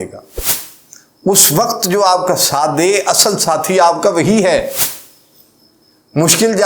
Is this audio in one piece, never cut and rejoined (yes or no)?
yes